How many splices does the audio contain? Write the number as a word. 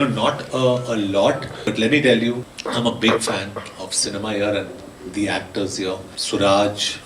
three